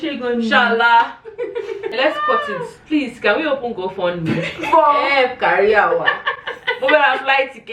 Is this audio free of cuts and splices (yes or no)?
no